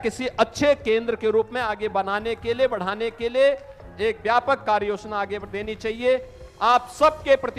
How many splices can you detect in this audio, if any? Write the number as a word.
zero